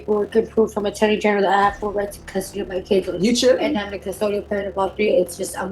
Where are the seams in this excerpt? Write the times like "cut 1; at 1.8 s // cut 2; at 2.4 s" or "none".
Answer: none